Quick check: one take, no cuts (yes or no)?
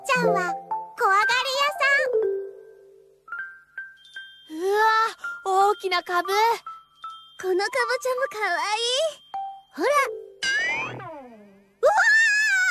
no